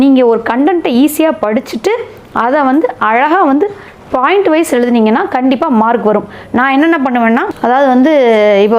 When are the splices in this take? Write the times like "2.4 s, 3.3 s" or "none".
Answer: 7.5 s

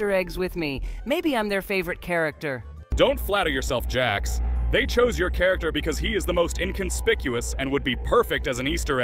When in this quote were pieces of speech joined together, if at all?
none

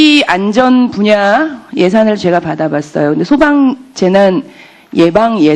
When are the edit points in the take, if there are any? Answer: 2.0 s

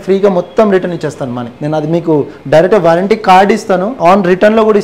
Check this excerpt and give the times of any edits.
3.9 s

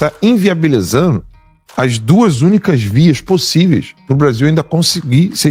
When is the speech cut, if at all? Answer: none

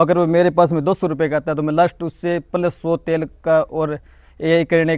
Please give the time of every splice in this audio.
none

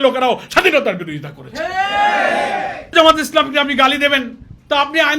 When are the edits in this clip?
2.9 s

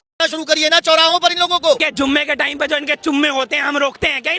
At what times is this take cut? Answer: 1.8 s

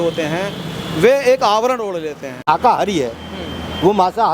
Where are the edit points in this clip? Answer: 2.4 s

